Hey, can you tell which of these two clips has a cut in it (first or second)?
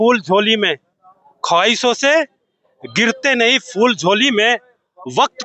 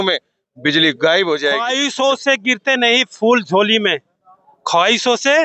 second